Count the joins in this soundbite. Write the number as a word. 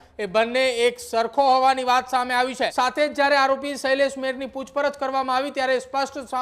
one